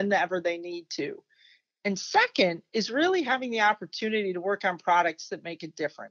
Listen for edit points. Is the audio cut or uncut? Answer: uncut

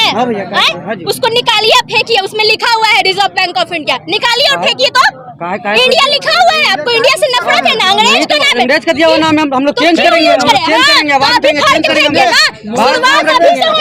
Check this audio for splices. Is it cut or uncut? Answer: uncut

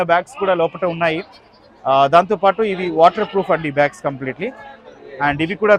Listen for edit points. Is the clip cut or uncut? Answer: uncut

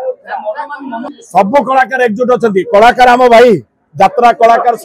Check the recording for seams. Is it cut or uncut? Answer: cut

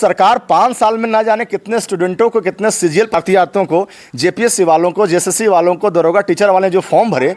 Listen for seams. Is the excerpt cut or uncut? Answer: cut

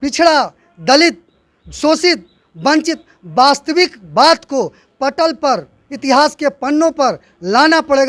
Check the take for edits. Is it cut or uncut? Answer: uncut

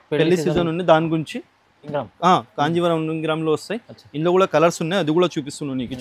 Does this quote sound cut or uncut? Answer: cut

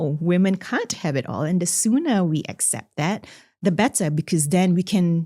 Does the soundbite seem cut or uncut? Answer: uncut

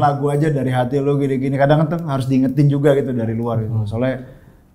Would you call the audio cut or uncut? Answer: uncut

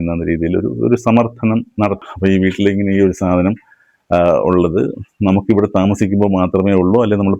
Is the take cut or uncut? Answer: cut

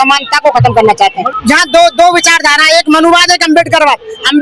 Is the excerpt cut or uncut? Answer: cut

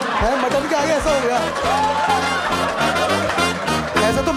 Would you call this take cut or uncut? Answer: uncut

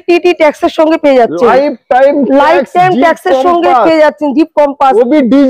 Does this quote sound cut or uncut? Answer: uncut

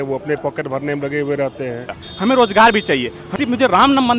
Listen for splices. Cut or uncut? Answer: cut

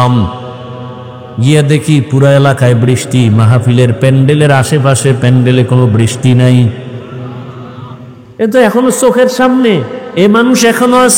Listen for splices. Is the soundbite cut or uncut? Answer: uncut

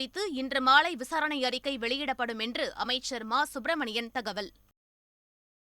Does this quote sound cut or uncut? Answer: uncut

